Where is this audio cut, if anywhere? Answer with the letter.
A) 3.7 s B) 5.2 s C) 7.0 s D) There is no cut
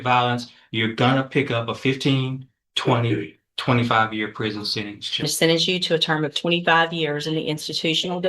B